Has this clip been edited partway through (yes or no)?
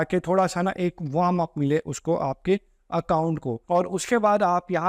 yes